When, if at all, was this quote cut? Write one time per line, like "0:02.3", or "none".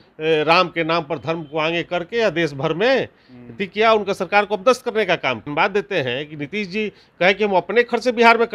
0:05.5